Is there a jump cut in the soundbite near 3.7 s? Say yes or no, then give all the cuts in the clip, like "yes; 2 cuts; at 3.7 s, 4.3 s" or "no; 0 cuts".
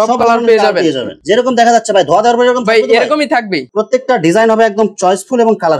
yes; 2 cuts; at 1.2 s, 3.7 s